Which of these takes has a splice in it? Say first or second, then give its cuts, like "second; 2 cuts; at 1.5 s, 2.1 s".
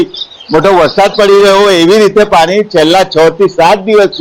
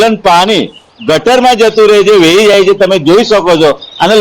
second; 1 cut; at 1.9 s